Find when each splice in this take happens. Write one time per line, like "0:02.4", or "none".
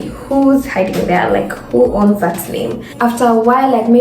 0:02.8